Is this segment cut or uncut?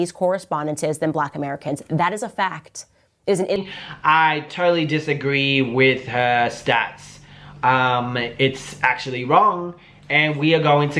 cut